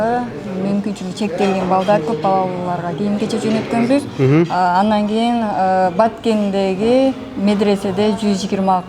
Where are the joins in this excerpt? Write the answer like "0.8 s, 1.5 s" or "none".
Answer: none

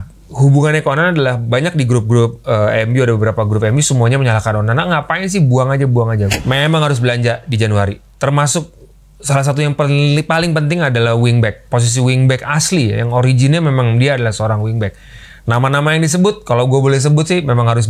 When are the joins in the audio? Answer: 6.2 s

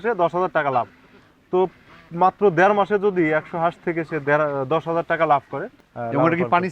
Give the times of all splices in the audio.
5.6 s

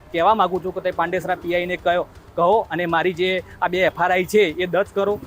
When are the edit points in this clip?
none

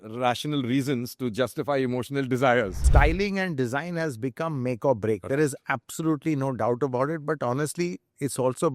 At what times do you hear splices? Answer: 2.9 s

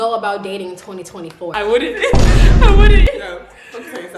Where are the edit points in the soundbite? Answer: 1.5 s

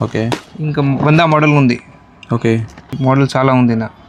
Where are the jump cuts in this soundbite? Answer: none

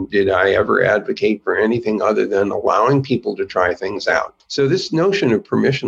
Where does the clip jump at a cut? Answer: 4.4 s

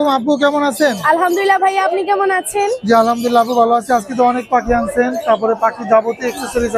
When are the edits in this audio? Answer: none

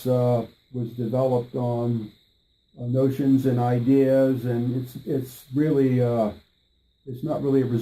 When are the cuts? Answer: 1.1 s

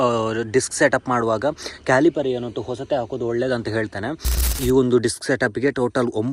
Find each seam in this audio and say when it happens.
4.6 s

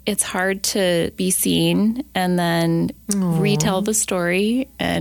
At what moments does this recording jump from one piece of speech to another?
1.1 s

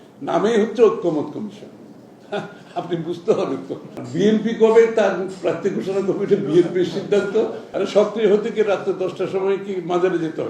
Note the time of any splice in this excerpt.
3.9 s, 7.7 s

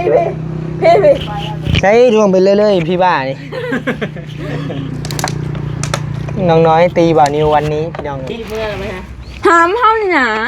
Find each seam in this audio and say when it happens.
8.3 s

